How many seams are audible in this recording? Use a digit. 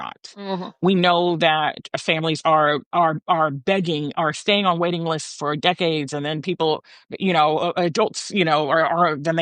0